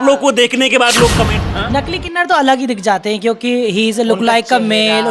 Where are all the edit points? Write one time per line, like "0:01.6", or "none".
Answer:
0:01.4